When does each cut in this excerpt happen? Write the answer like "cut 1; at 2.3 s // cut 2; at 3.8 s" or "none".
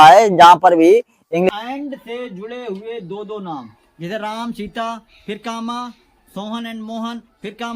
cut 1; at 1.6 s